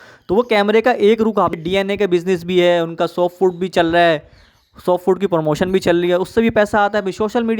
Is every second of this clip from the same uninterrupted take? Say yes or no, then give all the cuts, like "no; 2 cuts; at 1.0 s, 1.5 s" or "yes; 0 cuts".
no; 1 cut; at 1.6 s